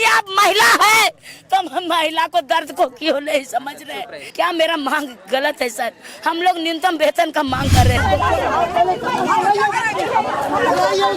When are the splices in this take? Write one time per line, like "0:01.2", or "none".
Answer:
0:04.2
0:08.0